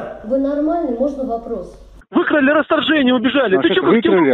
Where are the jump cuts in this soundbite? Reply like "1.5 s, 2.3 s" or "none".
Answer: 2.0 s